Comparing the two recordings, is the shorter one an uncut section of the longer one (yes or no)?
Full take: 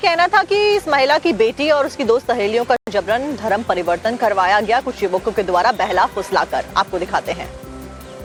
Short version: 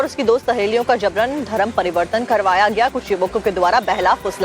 no